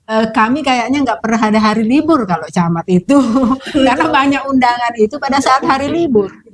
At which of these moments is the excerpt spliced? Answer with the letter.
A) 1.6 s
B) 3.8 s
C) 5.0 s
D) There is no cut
D